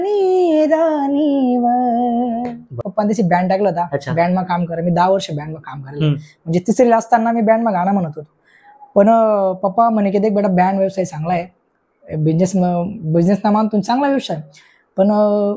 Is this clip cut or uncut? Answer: cut